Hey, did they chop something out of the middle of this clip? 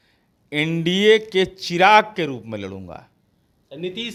no; 0 cuts

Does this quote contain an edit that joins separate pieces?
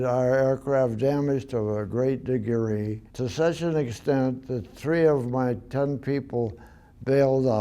yes; 1 cut; at 3.0 s

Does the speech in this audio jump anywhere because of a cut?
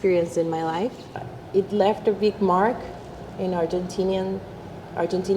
yes; 1 cut; at 1.1 s

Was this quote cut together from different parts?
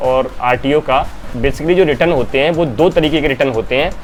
no; 0 cuts

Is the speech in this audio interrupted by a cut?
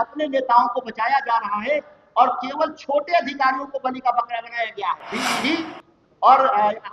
yes; 1 cut; at 5.1 s

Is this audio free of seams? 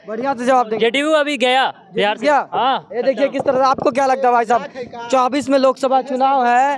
yes; 0 cuts

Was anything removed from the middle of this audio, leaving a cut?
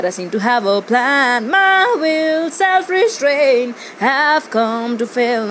no; 0 cuts

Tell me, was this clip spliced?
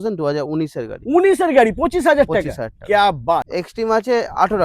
yes; 1 cut; at 3.5 s

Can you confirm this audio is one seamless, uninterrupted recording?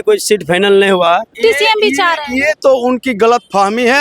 no; 1 cut; at 1.4 s

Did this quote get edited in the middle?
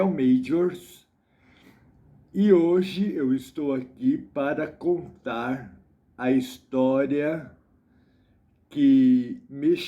no; 0 cuts

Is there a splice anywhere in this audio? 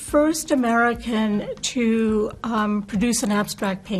no; 0 cuts

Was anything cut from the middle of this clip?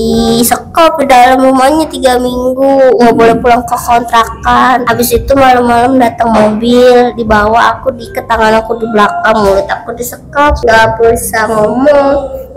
yes; 2 cuts; at 4.8 s, 10.6 s

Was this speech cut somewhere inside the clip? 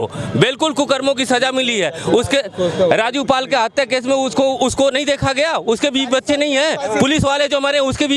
no; 0 cuts

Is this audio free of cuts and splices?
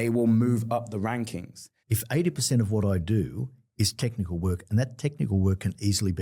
no; 1 cut; at 1.7 s

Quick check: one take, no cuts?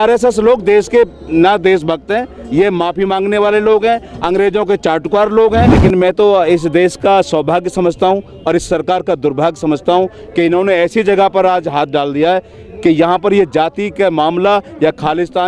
no; 1 cut; at 5.7 s

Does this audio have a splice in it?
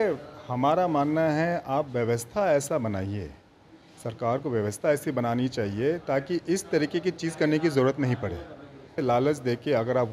yes; 1 cut; at 8.9 s

